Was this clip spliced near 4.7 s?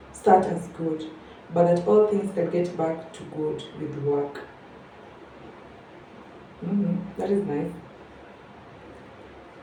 no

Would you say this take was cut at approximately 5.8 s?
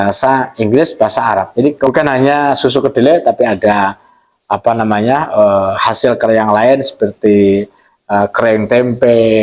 no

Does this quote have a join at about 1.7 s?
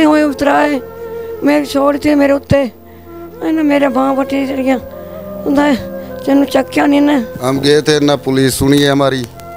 no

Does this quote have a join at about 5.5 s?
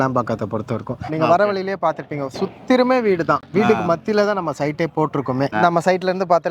yes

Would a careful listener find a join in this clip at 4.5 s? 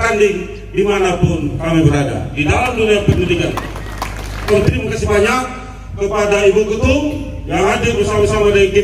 yes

